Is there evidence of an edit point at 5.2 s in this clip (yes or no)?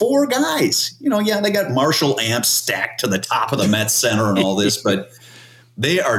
no